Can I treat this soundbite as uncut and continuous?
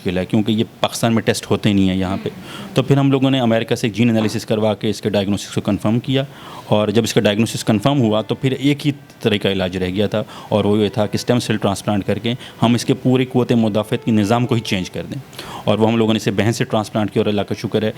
yes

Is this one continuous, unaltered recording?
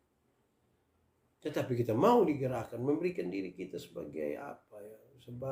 yes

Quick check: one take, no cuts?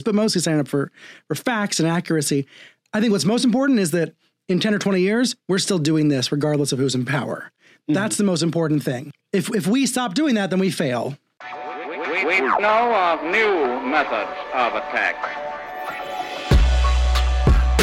no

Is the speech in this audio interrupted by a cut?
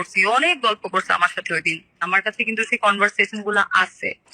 yes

